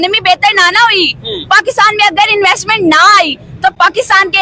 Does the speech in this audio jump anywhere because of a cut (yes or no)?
no